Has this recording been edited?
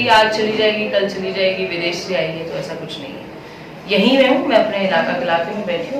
no; 0 cuts

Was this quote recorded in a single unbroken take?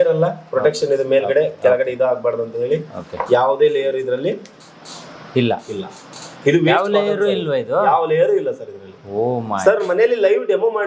yes; 0 cuts

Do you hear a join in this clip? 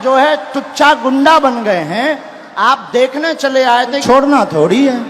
yes; 1 cut; at 4.0 s

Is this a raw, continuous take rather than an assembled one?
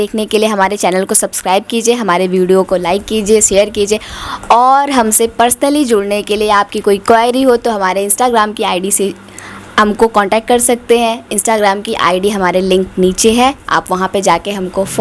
yes; 0 cuts

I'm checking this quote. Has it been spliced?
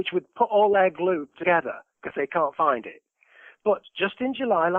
yes; 1 cut; at 1.3 s

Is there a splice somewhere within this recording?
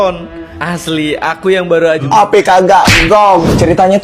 yes; 1 cut; at 2.0 s

